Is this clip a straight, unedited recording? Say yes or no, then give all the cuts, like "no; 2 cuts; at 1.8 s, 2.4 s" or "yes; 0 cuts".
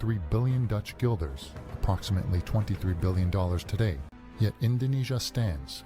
no; 1 cut; at 4.1 s